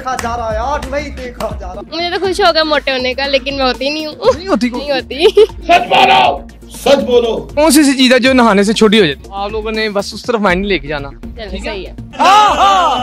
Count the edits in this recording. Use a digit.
3